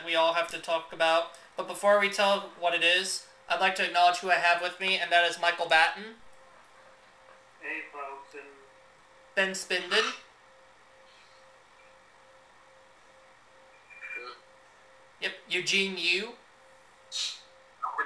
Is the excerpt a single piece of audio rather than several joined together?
no; 1 cut; at 15.9 s

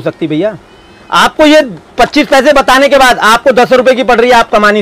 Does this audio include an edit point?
no; 0 cuts

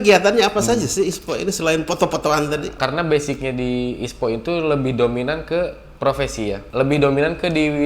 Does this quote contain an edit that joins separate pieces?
yes; 2 cuts; at 2.8 s, 6.6 s

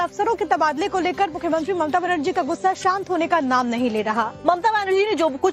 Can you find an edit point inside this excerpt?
yes; 1 cut; at 2.2 s

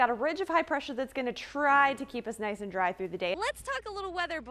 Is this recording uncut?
no; 1 cut; at 3.4 s

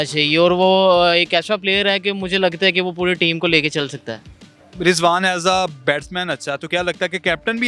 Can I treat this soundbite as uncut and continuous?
yes; 0 cuts

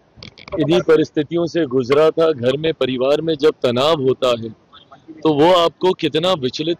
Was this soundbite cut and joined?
no; 0 cuts

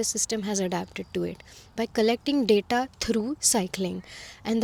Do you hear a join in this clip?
no; 0 cuts

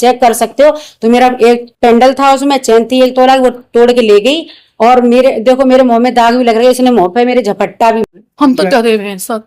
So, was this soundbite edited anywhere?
yes; 1 cut; at 8.1 s

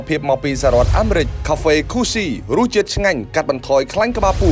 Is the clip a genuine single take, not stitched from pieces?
no; 1 cut; at 1.4 s

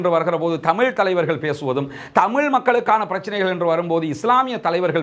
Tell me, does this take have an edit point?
no; 0 cuts

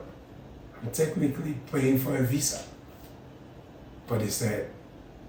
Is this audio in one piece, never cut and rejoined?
yes; 0 cuts

